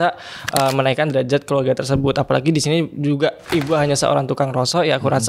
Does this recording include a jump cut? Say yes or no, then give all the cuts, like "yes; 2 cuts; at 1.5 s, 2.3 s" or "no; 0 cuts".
no; 0 cuts